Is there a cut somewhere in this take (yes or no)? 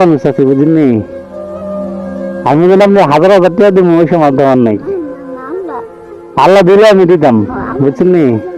yes